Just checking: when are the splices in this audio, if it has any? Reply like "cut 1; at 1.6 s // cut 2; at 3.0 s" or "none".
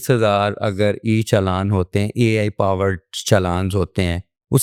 none